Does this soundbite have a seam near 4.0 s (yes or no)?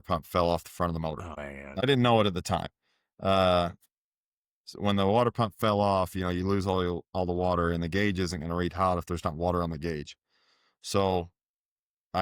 no